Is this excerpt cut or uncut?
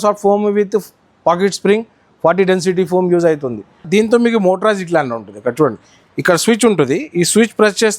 cut